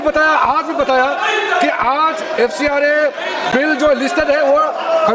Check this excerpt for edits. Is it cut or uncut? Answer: uncut